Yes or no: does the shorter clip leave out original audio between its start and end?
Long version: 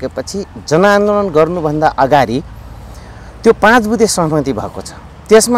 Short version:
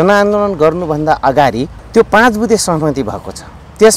yes